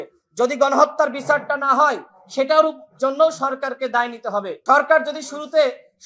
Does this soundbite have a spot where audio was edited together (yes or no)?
yes